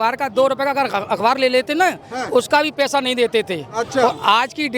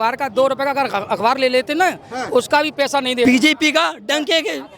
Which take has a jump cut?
second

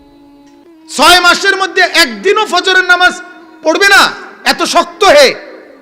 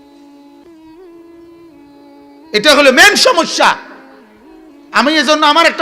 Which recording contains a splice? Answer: first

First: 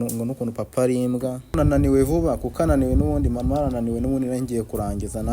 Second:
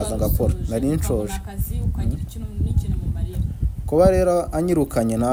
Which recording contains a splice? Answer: first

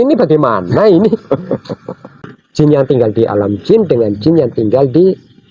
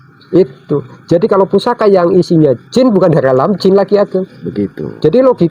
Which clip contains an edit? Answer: first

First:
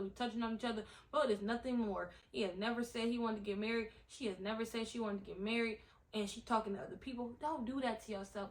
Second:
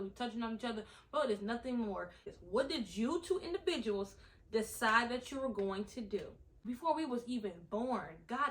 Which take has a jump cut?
second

